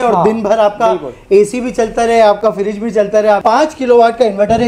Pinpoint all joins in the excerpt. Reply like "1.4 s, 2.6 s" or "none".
3.4 s